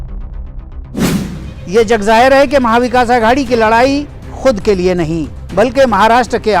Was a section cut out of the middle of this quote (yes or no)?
yes